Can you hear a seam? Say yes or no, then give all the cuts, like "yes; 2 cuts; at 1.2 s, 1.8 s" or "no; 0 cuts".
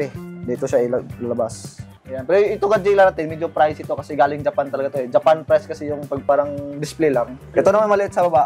yes; 2 cuts; at 1.9 s, 7.4 s